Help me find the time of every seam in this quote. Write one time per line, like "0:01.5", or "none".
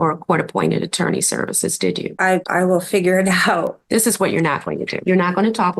0:02.2
0:03.8
0:04.9